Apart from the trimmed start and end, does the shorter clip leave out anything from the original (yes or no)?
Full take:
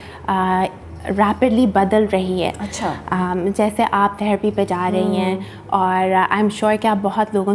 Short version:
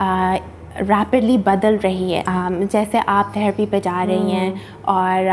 yes